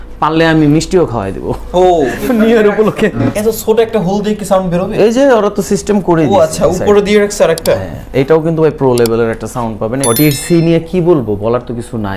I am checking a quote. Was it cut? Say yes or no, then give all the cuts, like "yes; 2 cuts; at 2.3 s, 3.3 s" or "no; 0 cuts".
yes; 2 cuts; at 3.3 s, 9.9 s